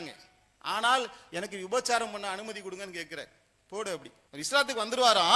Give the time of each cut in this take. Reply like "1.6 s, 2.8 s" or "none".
4.2 s